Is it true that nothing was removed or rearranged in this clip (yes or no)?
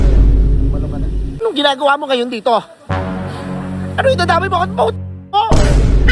no